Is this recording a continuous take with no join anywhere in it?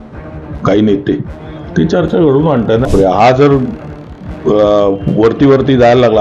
no; 1 cut; at 2.9 s

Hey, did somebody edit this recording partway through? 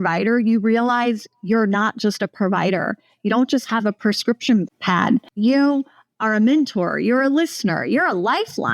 no; 0 cuts

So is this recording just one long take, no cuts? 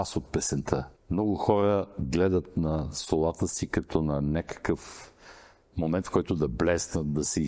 no; 1 cut; at 1.0 s

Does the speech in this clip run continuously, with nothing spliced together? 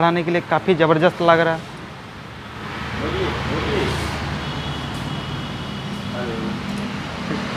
yes; 0 cuts

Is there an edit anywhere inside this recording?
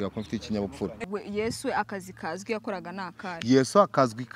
yes; 1 cut; at 1.0 s

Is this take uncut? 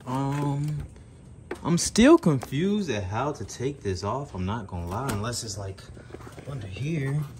yes; 0 cuts

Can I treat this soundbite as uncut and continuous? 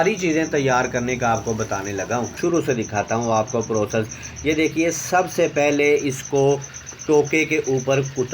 no; 1 cut; at 2.3 s

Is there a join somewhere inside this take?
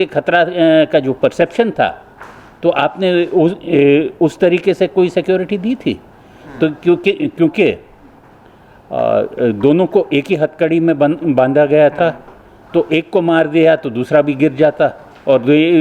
no; 0 cuts

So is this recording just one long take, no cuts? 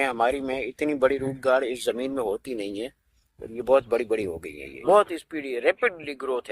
yes; 0 cuts

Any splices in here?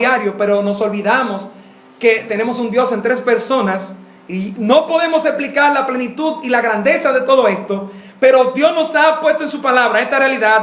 no; 0 cuts

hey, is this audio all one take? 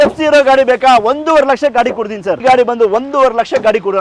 no; 1 cut; at 2.4 s

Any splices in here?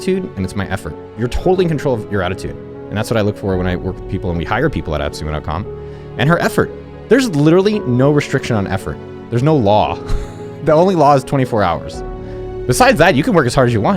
no; 0 cuts

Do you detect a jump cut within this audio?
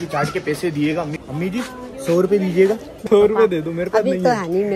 yes; 2 cuts; at 1.1 s, 2.9 s

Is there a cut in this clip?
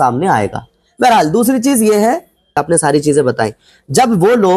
yes; 1 cut; at 2.6 s

